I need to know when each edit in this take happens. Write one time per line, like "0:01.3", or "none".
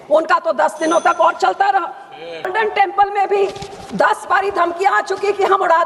0:02.5